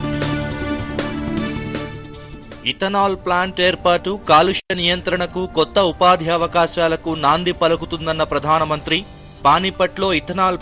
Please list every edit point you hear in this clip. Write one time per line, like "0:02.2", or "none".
0:01.2